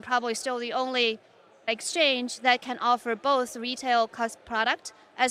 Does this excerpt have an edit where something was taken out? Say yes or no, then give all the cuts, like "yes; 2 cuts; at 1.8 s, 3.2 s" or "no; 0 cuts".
yes; 1 cut; at 1.7 s